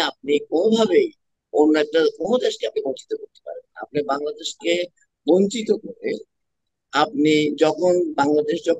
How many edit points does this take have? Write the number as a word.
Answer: zero